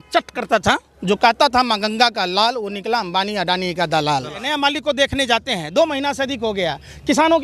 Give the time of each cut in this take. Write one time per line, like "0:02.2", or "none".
0:00.9
0:04.4